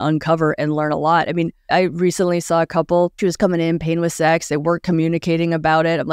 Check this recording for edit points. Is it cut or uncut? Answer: cut